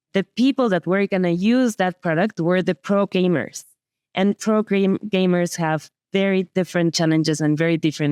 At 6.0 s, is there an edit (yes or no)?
no